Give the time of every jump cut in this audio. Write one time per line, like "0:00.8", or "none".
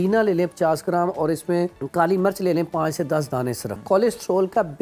0:01.8
0:03.7